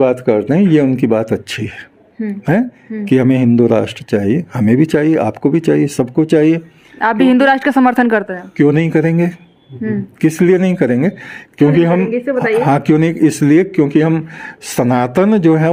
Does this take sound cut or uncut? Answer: uncut